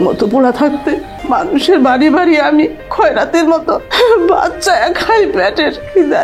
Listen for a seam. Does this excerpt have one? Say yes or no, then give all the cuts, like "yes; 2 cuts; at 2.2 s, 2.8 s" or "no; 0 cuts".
yes; 2 cuts; at 1.2 s, 3.9 s